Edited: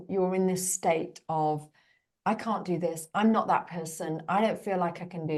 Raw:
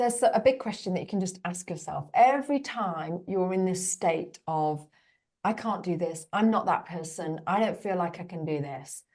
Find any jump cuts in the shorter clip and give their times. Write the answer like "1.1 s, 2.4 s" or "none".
none

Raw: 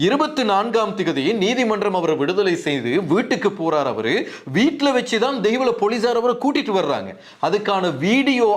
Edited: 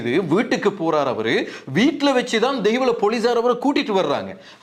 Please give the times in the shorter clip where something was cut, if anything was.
none

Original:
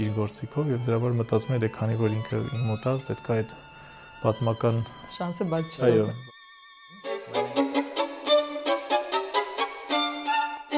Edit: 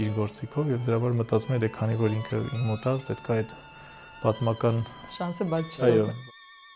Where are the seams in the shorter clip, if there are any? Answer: none

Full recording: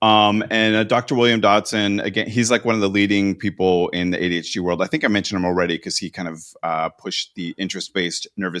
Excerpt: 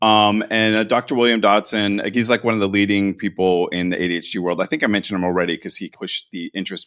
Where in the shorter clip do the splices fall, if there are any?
2.1 s, 5.9 s

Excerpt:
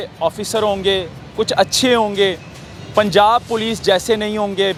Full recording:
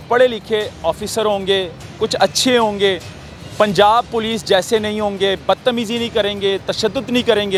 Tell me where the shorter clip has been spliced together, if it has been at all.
none

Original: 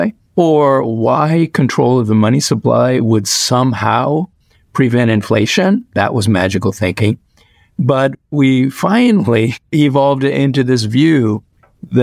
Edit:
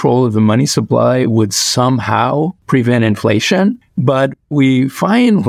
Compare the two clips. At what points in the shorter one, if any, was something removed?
2.6 s, 3.8 s

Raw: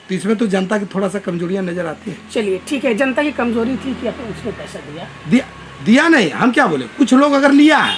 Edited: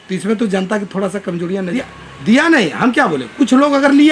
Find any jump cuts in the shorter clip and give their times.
1.8 s

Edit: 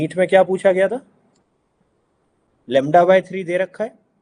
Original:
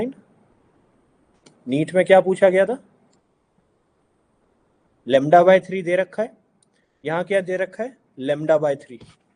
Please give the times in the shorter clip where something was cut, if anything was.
2.5 s

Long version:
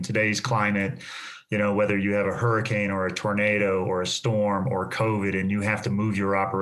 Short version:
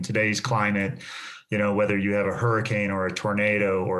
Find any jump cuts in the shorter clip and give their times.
none

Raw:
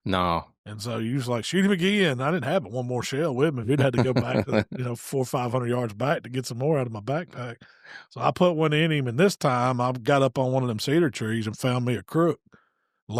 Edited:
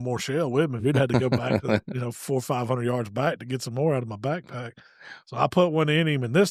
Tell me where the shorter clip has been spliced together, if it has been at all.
none

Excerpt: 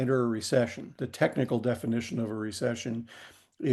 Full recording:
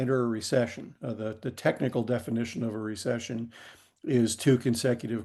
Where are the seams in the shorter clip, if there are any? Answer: 1.0 s

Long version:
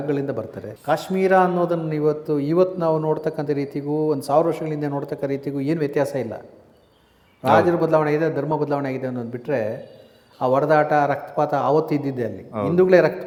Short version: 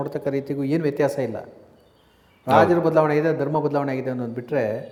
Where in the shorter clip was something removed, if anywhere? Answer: none

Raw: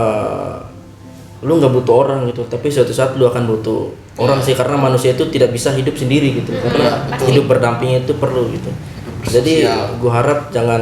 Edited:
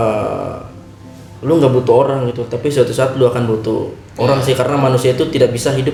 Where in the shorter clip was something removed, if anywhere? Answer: none

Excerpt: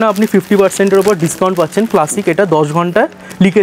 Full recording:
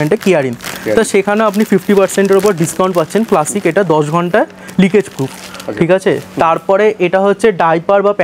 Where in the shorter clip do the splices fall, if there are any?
none

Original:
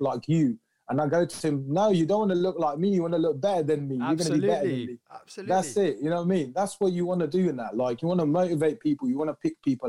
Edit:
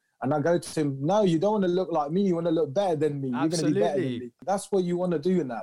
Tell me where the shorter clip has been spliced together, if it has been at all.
4.4 s

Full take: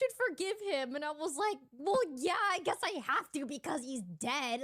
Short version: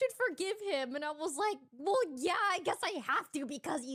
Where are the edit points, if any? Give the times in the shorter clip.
none

